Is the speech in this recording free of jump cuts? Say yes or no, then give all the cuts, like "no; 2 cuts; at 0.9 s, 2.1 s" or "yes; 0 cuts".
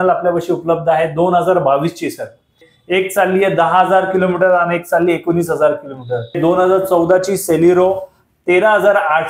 no; 2 cuts; at 2.7 s, 6.4 s